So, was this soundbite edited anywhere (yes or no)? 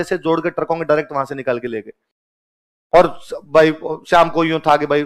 no